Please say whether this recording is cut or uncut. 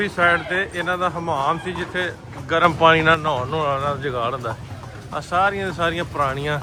uncut